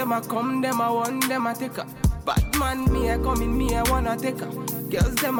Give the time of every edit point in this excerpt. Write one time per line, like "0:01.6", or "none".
none